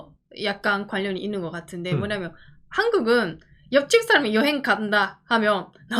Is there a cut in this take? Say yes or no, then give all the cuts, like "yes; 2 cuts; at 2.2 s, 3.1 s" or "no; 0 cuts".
no; 0 cuts